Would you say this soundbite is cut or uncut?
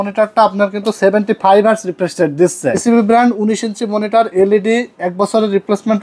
cut